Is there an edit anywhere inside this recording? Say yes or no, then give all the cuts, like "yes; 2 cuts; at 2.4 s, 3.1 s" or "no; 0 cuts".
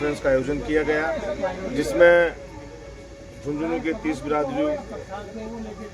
no; 0 cuts